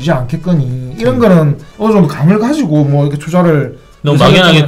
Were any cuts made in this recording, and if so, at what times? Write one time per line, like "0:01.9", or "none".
0:01.6